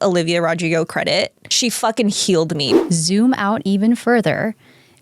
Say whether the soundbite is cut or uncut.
cut